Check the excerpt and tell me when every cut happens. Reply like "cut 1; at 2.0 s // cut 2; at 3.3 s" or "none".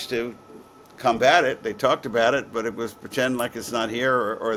none